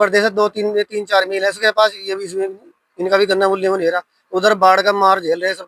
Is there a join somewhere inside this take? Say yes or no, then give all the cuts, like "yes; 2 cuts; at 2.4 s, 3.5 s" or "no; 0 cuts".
no; 0 cuts